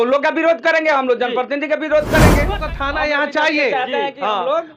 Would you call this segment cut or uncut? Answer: cut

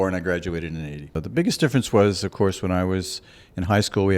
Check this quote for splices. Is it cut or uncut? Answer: cut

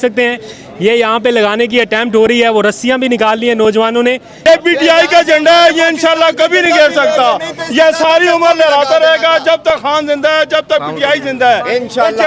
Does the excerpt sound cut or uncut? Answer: cut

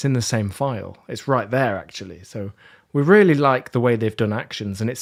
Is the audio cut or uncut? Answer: uncut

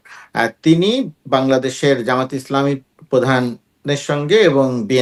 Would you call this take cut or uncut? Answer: uncut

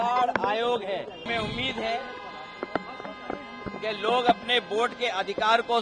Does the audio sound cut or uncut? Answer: cut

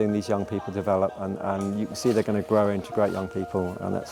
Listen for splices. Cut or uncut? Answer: uncut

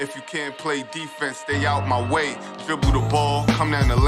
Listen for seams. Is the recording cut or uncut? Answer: uncut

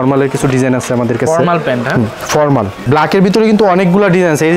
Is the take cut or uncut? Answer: cut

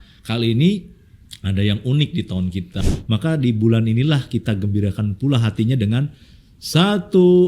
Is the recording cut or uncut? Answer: cut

